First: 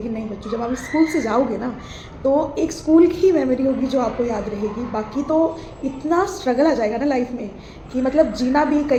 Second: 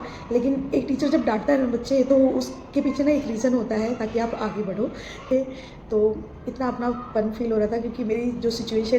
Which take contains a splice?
second; 1 cut; at 5.3 s

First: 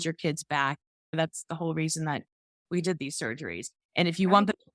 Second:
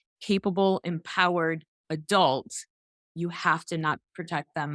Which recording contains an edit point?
first; 1 cut; at 1.1 s

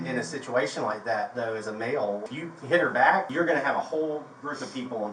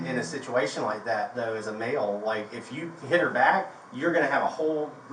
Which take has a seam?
first; 2 cuts; at 2.2 s, 3.3 s

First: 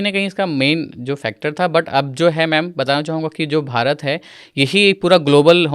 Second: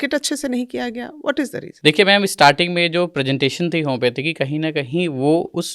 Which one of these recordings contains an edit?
second; 1 cut; at 1.6 s

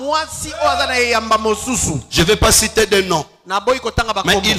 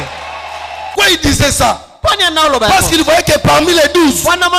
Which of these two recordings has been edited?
second; 1 cut; at 0.9 s

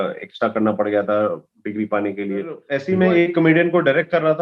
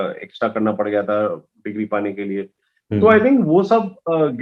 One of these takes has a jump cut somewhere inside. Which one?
first; 1 cut; at 2.7 s

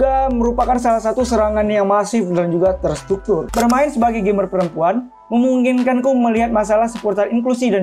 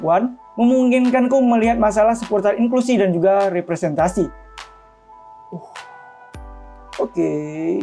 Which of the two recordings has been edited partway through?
first; 1 cut; at 3.5 s

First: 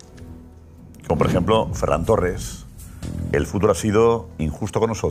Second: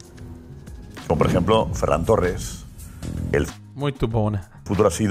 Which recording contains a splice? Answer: first; 1 cut; at 3.5 s

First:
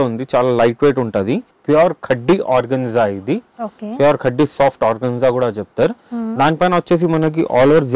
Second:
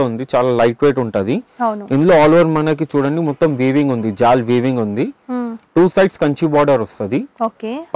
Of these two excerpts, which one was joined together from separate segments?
first; 1 cut; at 1.5 s

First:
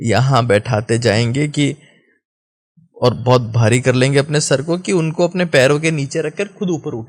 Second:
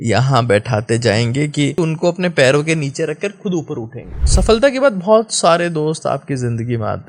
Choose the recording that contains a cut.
second; 2 cuts; at 1.8 s, 4.2 s

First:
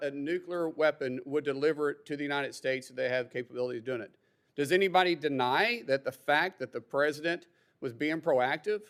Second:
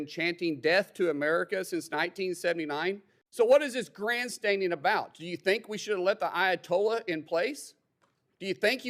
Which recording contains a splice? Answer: second; 1 cut; at 3.1 s

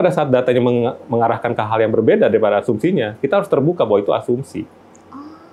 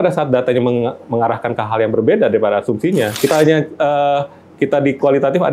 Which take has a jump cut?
second; 1 cut; at 3.3 s

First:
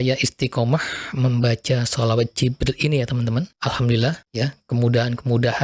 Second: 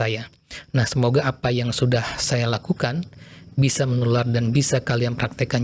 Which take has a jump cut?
first; 2 cuts; at 3.5 s, 4.2 s

